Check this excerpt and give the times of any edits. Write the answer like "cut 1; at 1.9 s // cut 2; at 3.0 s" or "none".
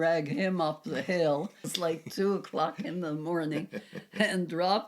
cut 1; at 1.7 s